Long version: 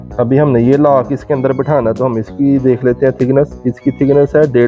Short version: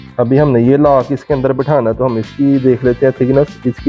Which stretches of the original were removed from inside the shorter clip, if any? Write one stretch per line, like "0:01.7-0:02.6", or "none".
none